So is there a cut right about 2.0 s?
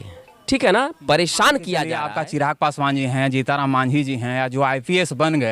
yes; 1 cut; at 2.0 s

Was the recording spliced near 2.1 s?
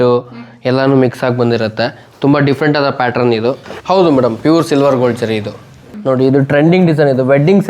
no; 2 cuts; at 3.6 s, 5.9 s

